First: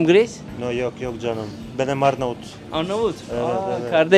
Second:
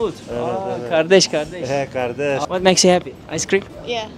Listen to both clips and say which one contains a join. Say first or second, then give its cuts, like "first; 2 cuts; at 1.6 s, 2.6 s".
second; 1 cut; at 2.4 s